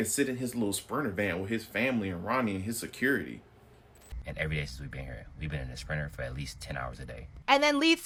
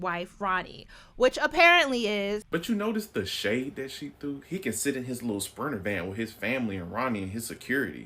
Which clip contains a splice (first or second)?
second